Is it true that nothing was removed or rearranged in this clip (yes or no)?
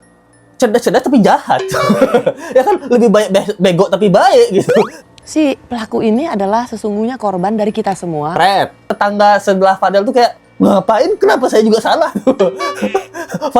no